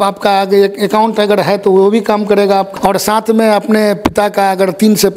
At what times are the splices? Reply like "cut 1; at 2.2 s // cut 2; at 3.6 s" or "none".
cut 1; at 2.7 s